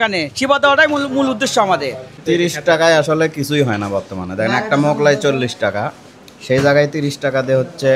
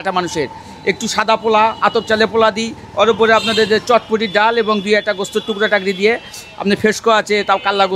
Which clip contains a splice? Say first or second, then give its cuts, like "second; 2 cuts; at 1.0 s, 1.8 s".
first; 1 cut; at 2.1 s